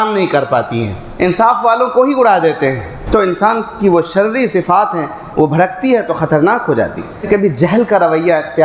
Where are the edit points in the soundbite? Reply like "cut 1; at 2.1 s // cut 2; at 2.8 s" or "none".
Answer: cut 1; at 1.0 s // cut 2; at 2.9 s // cut 3; at 7.2 s